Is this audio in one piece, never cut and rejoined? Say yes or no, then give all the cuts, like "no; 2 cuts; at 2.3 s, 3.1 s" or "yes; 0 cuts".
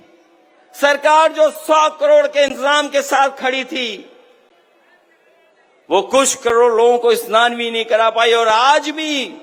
yes; 0 cuts